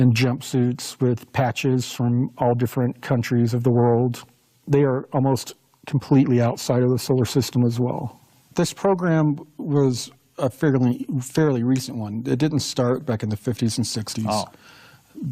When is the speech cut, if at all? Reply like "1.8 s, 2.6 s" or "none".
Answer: 1.2 s

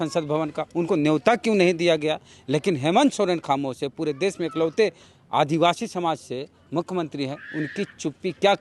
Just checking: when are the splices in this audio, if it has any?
none

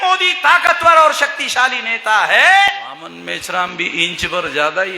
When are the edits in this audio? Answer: 2.9 s

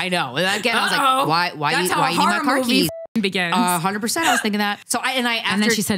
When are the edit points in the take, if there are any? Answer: 4.8 s

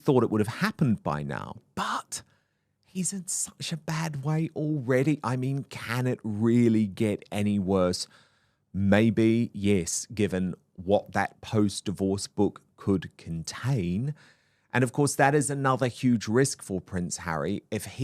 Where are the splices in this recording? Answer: 1.7 s

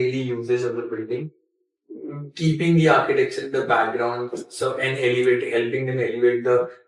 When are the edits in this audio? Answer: none

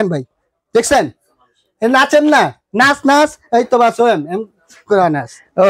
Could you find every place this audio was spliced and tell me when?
none

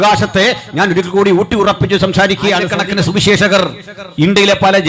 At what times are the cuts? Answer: 2.8 s

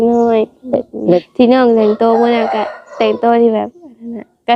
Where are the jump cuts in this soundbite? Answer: 1.2 s

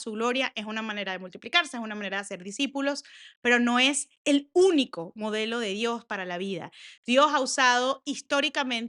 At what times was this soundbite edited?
none

